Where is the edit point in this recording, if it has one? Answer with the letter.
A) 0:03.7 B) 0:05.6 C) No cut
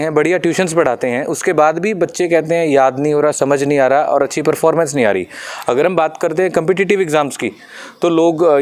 C